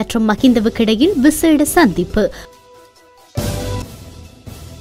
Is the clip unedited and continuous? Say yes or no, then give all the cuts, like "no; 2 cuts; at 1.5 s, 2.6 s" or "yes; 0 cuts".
yes; 0 cuts